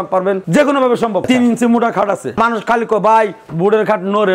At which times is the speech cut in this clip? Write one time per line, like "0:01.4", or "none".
0:01.2
0:02.3